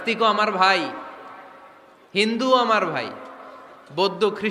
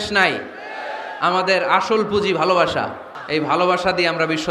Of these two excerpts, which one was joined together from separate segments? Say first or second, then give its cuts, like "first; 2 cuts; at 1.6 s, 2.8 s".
second; 1 cut; at 3.1 s